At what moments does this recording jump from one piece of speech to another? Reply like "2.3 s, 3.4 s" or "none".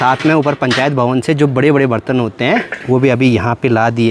none